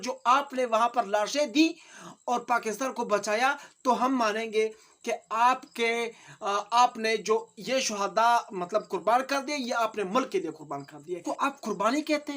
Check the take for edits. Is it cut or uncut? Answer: cut